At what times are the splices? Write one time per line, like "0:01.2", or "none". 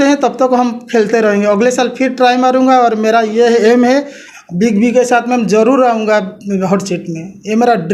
none